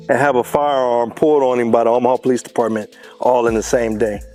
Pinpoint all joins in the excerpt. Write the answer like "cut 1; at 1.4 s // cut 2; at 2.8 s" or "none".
none